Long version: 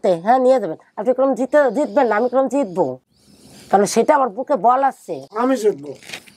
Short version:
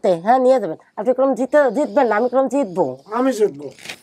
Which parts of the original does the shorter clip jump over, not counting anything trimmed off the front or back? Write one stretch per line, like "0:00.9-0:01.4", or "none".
0:03.0-0:05.3